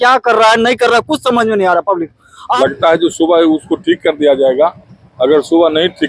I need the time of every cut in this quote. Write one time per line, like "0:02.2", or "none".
0:02.3